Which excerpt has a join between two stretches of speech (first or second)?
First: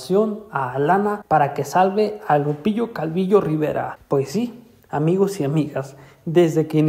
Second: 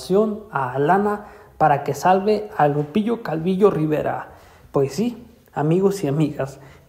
first